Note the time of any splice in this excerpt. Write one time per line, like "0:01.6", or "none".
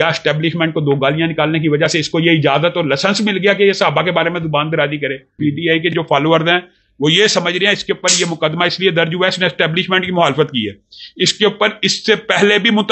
0:05.3